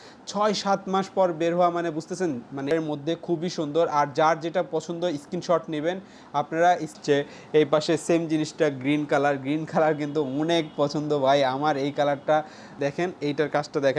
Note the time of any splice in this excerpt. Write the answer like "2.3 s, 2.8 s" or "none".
2.7 s, 7.0 s, 12.8 s

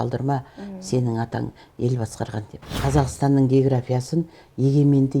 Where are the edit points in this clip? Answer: 2.6 s

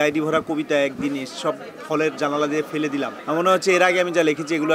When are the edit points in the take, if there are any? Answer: 3.2 s

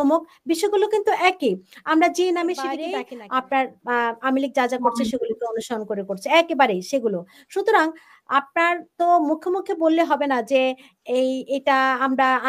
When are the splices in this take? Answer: 2.8 s

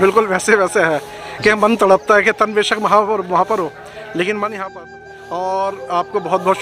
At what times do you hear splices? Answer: 4.9 s

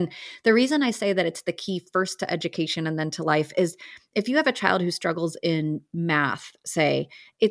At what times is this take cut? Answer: none

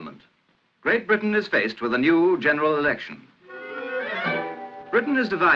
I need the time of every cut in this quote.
2.6 s

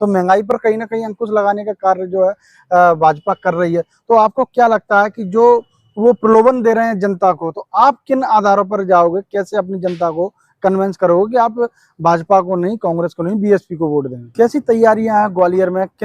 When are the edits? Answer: 14.2 s

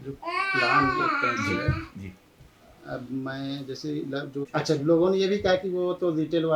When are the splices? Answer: 4.5 s

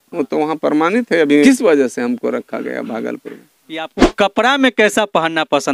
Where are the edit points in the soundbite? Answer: 1.4 s, 4.0 s

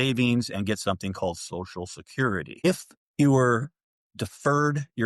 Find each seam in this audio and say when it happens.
2.6 s

